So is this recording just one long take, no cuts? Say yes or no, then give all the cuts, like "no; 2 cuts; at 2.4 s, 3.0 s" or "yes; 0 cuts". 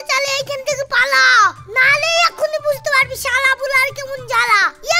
yes; 0 cuts